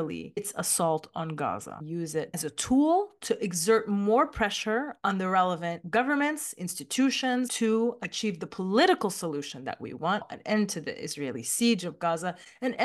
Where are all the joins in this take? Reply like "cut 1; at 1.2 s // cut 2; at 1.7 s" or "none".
cut 1; at 2.2 s // cut 2; at 7.5 s // cut 3; at 10.3 s